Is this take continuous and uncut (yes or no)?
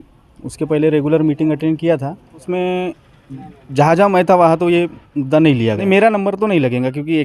no